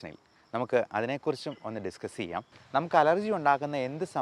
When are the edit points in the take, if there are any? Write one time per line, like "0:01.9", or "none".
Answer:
0:02.5